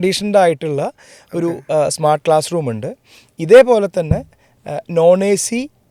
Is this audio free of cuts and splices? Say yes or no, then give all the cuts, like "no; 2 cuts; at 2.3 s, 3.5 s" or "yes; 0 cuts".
yes; 0 cuts